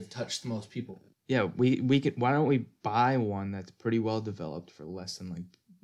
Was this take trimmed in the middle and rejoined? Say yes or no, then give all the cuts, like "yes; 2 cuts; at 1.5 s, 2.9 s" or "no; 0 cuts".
yes; 1 cut; at 1.1 s